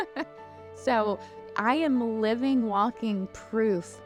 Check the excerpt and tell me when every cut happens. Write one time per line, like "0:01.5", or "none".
none